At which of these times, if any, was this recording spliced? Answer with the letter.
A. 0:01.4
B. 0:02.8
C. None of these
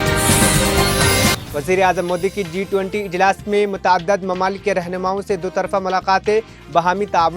A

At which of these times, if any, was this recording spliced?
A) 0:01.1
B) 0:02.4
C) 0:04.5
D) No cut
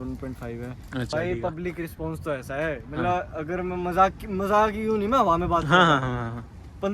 A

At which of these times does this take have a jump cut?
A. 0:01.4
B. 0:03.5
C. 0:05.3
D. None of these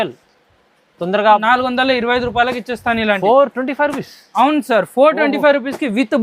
A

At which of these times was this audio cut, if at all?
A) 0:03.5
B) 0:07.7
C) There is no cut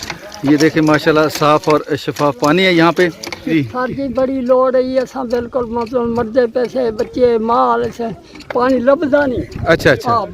A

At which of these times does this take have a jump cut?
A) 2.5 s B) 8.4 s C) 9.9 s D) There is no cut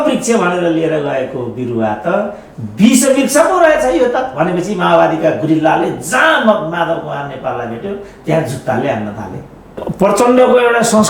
C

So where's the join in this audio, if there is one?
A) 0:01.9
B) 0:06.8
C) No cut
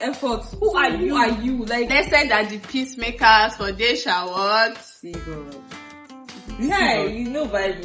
A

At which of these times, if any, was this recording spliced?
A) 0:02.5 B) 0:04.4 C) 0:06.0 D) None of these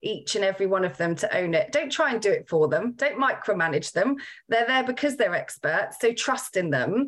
D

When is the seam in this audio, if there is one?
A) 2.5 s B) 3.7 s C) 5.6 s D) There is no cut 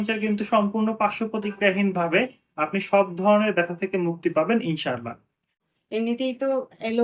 C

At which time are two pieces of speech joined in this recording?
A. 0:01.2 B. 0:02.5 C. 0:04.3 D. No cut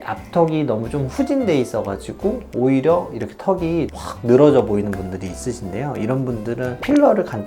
D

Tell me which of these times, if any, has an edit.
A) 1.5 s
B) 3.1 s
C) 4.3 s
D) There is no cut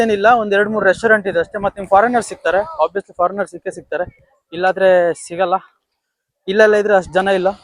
C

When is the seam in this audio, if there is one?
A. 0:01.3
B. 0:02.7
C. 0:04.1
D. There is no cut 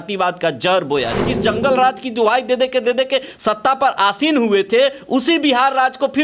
A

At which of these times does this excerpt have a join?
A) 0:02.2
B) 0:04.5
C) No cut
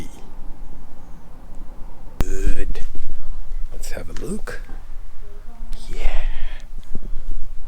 A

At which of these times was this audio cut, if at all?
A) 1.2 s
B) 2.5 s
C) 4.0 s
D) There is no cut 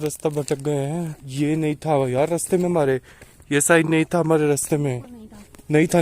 A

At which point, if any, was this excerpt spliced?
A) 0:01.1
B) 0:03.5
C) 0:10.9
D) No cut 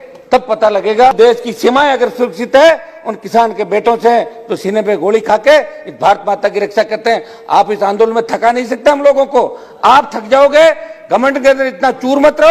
A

